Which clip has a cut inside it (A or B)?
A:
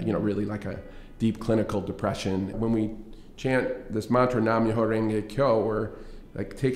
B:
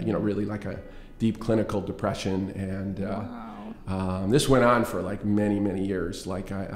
A